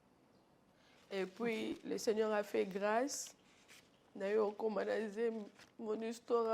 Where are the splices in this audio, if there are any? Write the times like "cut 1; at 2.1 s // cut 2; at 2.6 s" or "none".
cut 1; at 1.0 s